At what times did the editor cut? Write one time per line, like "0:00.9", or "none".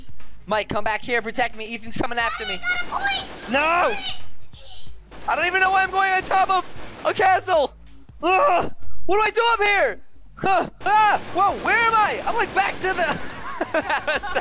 none